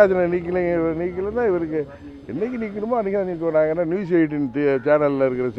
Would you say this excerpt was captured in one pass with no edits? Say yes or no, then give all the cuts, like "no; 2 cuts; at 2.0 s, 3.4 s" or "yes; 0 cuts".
yes; 0 cuts